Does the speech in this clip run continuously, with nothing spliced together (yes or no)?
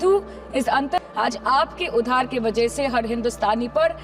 no